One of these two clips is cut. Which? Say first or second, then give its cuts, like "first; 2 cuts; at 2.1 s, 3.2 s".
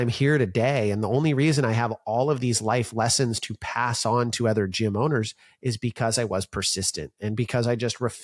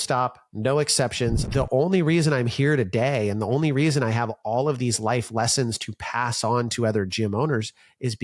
second; 1 cut; at 1.4 s